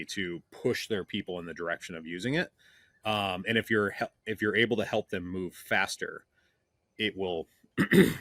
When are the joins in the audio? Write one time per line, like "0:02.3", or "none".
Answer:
none